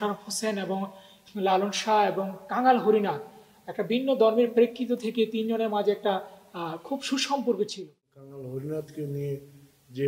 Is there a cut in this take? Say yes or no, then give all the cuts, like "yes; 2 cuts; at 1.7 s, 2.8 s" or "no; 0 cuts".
yes; 1 cut; at 8.0 s